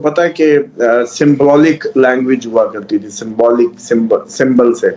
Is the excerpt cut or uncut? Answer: uncut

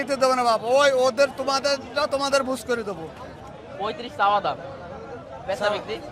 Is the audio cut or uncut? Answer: cut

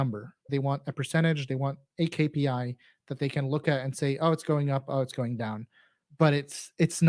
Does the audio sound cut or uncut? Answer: uncut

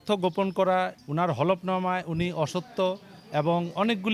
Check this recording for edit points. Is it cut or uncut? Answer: cut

